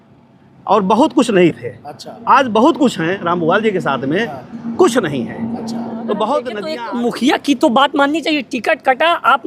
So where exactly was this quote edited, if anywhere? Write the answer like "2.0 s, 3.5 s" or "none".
6.6 s